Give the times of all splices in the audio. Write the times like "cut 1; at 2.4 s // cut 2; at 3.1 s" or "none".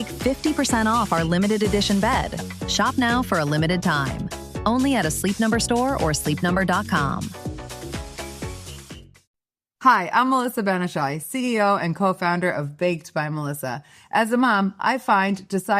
cut 1; at 9.2 s